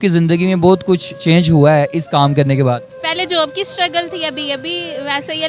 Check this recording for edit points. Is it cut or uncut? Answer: cut